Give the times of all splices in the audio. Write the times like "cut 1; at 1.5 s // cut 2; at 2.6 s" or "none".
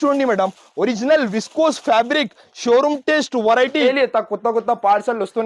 cut 1; at 3.8 s